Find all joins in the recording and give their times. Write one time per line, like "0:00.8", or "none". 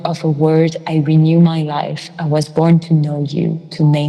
none